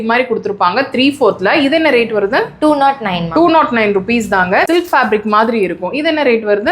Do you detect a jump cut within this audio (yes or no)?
yes